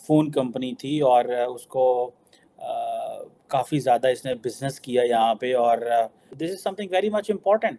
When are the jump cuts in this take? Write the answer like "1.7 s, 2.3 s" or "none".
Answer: none